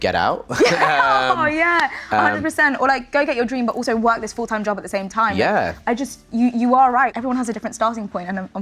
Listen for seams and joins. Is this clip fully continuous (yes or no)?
yes